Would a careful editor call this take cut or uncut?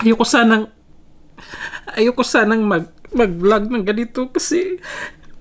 uncut